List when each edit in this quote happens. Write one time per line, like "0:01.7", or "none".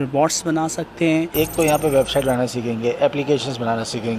0:01.3